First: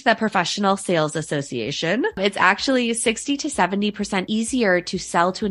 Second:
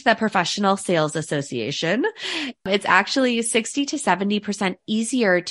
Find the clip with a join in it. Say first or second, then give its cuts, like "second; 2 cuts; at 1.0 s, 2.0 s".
first; 2 cuts; at 2.1 s, 4.3 s